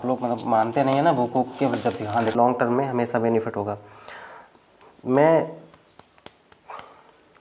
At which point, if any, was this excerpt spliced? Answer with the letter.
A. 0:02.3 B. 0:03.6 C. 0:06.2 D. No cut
A